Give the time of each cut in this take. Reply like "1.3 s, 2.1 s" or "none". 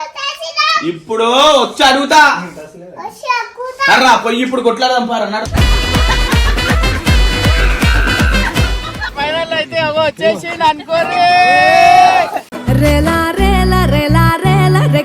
9.1 s